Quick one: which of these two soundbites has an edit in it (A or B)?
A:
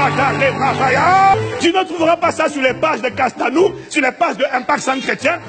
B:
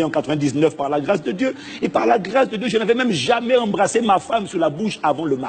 A